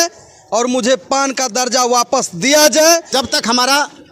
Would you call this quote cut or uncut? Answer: cut